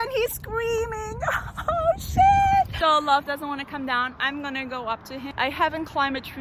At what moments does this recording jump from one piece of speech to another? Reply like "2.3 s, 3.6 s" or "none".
2.7 s, 5.3 s